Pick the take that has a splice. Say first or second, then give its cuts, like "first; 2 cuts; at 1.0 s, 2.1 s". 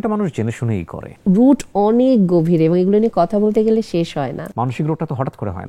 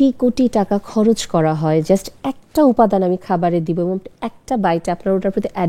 first; 2 cuts; at 1.1 s, 4.4 s